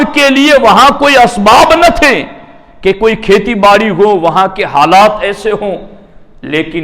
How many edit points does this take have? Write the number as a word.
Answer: zero